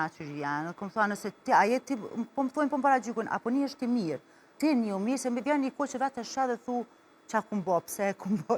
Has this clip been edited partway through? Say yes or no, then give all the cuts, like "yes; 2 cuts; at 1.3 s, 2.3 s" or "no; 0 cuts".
yes; 1 cut; at 4.5 s